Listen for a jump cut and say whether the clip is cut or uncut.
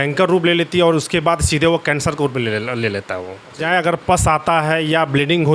cut